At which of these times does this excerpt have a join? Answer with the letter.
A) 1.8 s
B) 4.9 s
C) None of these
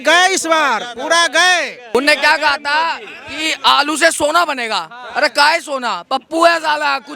A